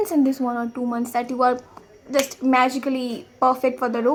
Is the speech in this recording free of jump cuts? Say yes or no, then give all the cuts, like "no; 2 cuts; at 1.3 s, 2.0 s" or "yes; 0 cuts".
yes; 0 cuts